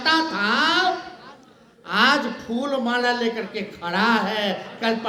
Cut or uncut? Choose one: uncut